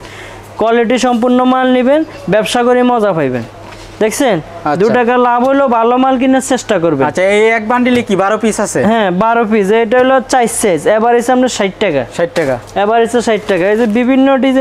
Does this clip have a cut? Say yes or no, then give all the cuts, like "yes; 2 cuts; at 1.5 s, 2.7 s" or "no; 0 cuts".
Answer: no; 0 cuts